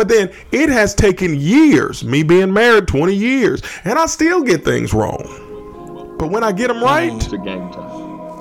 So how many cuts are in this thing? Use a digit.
1